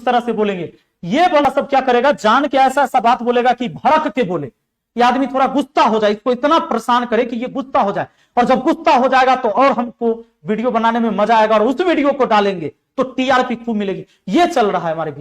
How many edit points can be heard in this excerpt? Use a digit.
1